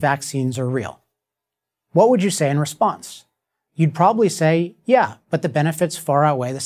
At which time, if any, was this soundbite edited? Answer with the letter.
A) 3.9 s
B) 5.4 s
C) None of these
B